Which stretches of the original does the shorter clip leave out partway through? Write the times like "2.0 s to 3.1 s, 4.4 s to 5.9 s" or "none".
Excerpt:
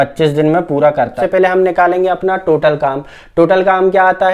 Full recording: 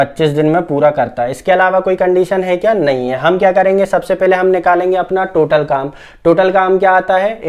1.2 s to 4.1 s